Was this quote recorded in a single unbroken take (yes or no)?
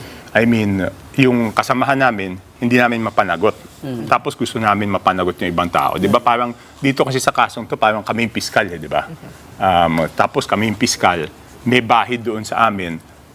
no